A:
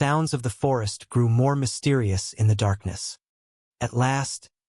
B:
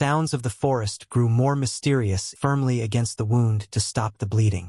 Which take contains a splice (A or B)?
B